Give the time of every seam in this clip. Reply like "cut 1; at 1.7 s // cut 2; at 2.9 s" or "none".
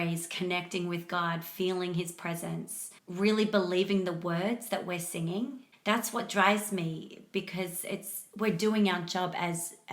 cut 1; at 5.7 s